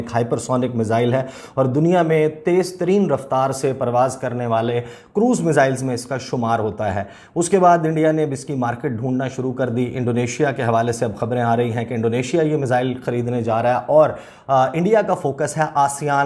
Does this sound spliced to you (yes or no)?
no